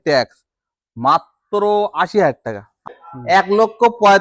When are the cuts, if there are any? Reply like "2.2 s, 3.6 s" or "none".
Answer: 2.9 s